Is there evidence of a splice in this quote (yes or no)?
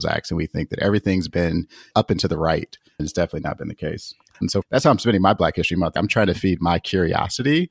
yes